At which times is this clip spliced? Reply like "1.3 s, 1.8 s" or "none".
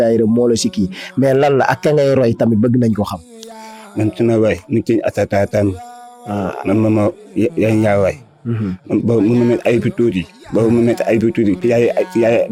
none